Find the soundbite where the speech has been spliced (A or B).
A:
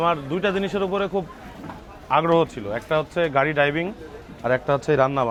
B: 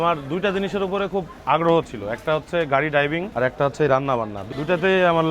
B